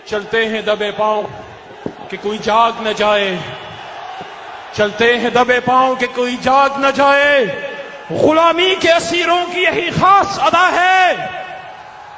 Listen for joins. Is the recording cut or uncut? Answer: cut